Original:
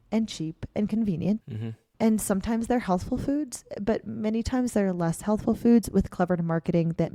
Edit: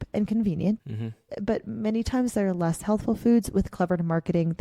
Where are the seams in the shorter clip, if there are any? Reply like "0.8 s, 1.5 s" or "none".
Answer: 1.2 s